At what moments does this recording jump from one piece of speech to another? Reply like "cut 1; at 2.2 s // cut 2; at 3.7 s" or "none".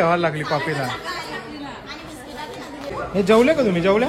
cut 1; at 2.9 s